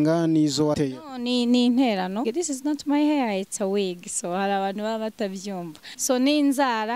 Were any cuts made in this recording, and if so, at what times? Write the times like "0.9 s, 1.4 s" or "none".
0.8 s, 2.3 s, 5.9 s